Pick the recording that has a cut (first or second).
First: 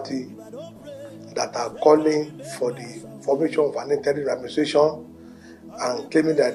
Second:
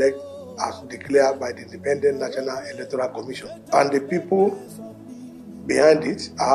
second